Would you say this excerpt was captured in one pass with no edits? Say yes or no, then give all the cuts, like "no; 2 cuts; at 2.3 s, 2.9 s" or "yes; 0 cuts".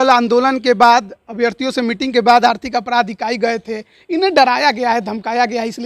yes; 0 cuts